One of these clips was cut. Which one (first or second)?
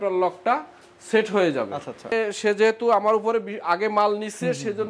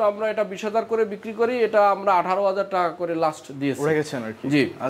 first